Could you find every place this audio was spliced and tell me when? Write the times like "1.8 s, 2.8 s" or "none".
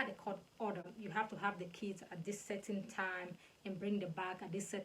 0.9 s